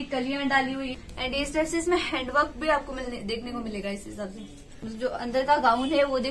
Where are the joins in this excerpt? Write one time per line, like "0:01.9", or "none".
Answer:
0:00.9
0:04.8

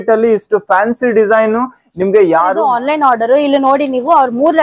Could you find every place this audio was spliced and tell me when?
0:02.5

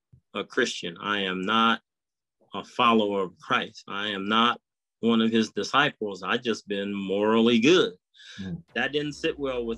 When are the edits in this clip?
0:08.7

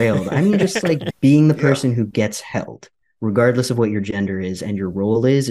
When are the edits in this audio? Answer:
0:01.0

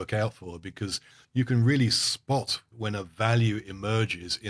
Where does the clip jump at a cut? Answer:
0:01.2
0:02.7

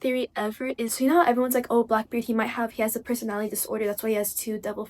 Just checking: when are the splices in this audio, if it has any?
0:00.9

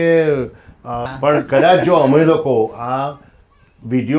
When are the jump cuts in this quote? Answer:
0:01.0

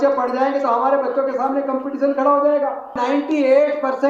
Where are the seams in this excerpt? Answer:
0:03.0

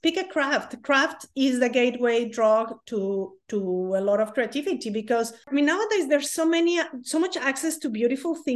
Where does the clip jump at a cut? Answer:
0:05.5

